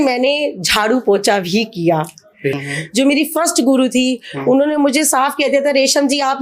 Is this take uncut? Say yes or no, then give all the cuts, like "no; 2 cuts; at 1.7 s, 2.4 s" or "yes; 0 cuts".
no; 1 cut; at 2.6 s